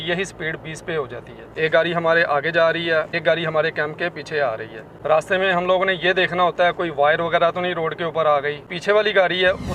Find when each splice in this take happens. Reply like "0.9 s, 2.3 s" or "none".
1.5 s, 3.1 s, 4.9 s, 8.6 s